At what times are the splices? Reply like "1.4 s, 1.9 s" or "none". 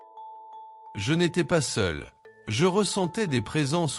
0.9 s